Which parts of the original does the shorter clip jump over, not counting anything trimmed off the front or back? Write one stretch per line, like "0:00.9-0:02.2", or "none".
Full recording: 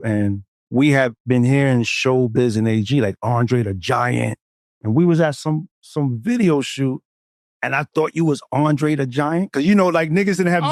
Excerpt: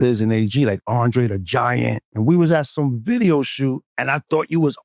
0:04.4-0:04.7
0:05.4-0:05.9
0:07.1-0:07.6